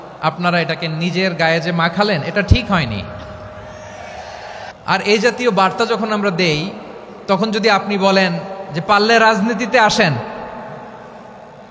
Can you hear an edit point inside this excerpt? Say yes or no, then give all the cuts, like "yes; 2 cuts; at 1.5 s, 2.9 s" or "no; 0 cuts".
yes; 1 cut; at 4.7 s